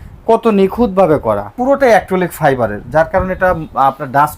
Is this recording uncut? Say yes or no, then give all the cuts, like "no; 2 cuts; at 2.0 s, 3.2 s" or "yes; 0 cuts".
no; 1 cut; at 1.5 s